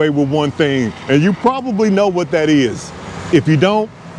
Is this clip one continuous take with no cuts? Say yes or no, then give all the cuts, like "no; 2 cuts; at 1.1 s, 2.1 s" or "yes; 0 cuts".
yes; 0 cuts